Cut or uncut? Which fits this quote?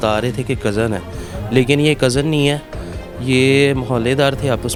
uncut